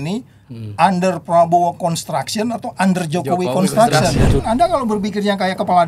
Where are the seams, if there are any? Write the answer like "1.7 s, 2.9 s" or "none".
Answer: 4.4 s